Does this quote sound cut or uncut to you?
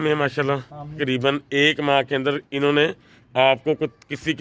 cut